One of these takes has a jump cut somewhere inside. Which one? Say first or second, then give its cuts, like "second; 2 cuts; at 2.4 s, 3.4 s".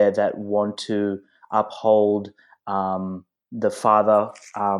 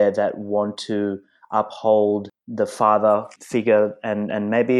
second; 2 cuts; at 2.4 s, 3.4 s